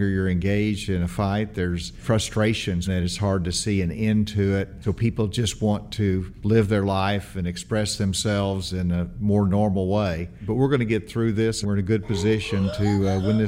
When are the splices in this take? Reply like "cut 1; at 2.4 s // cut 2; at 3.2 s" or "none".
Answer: cut 1; at 2.0 s // cut 2; at 2.9 s // cut 3; at 4.8 s // cut 4; at 6.3 s // cut 5; at 10.5 s // cut 6; at 11.6 s